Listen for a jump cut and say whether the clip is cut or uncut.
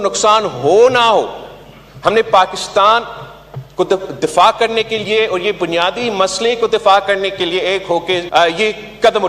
cut